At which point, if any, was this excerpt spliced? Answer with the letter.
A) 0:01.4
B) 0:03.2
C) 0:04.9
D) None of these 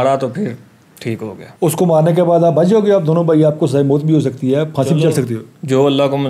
A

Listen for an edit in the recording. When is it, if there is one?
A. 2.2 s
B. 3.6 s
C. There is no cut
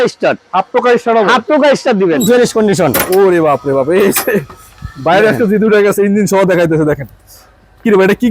A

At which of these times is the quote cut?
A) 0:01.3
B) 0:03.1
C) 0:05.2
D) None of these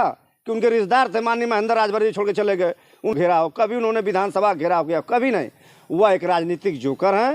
B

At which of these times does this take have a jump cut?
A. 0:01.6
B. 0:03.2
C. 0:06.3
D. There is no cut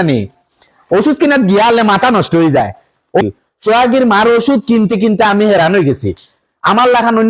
B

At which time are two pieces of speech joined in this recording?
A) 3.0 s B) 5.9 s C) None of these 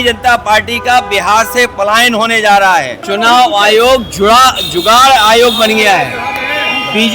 A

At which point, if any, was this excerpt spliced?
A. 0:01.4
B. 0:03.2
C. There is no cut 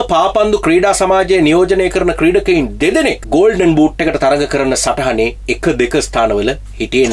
B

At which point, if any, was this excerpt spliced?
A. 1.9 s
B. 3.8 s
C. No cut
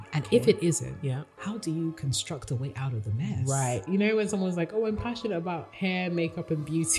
B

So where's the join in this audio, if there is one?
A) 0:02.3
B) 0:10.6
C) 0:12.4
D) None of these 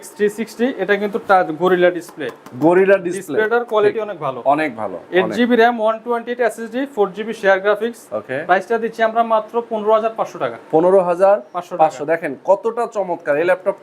D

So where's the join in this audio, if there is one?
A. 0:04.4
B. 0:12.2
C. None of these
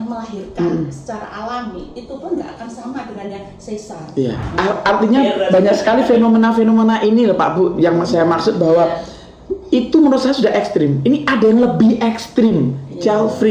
A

